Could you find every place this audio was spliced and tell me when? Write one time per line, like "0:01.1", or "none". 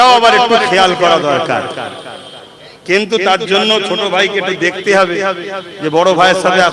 none